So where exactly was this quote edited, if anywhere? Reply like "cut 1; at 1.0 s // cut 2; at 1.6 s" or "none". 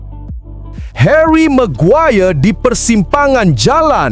cut 1; at 1.0 s